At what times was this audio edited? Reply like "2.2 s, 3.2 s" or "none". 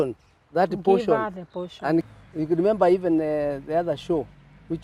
2.1 s